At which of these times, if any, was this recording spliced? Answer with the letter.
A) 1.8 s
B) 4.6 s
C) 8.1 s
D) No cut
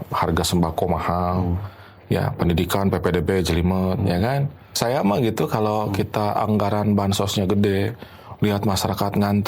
B